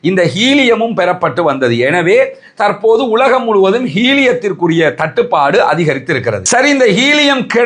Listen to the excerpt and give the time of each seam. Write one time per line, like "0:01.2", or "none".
0:06.5